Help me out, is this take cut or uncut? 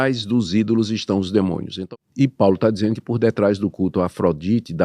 cut